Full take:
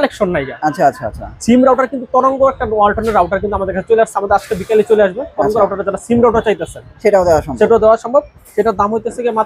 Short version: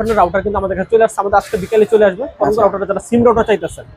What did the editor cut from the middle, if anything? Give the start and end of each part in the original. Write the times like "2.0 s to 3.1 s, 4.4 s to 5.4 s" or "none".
none